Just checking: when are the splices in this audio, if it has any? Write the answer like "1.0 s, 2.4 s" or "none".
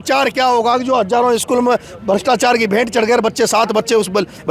none